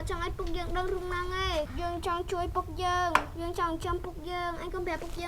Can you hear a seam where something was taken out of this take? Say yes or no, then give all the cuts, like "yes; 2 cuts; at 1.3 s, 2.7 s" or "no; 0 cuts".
yes; 1 cut; at 1.7 s